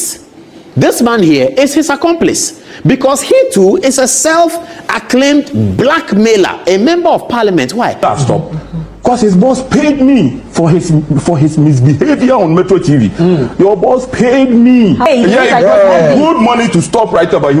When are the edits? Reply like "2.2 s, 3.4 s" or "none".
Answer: 8.0 s, 15.1 s